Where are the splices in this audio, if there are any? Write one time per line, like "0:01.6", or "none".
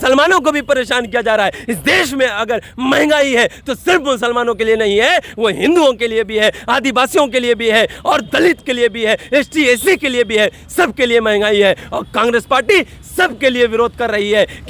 none